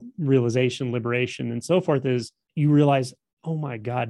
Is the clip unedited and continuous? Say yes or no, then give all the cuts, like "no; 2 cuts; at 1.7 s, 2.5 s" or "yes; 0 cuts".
no; 1 cut; at 2.4 s